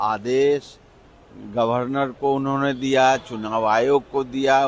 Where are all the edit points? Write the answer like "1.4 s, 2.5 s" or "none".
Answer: none